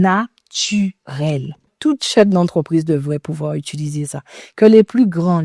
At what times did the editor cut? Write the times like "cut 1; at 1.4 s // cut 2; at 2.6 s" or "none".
cut 1; at 1.7 s